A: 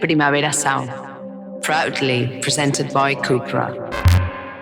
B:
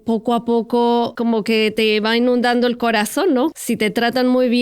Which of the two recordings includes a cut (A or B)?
B